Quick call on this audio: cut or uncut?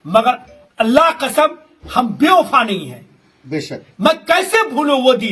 uncut